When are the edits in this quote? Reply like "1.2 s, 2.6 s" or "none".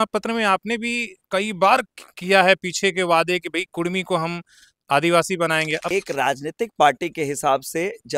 5.9 s

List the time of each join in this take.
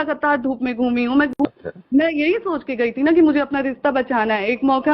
1.3 s

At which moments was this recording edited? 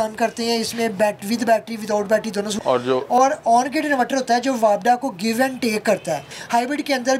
2.6 s, 6.3 s

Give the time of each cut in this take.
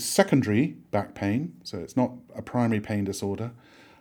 none

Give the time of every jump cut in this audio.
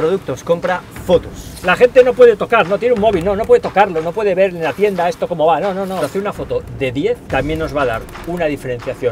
1.4 s, 6.0 s, 7.2 s

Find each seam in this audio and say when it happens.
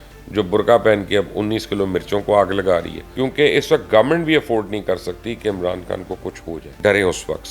3.0 s, 6.7 s

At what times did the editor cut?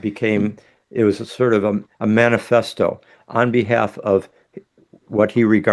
none

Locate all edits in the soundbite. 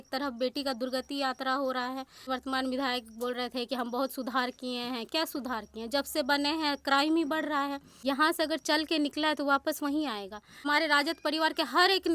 2.3 s, 7.9 s, 10.7 s

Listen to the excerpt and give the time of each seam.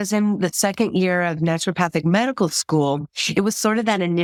none

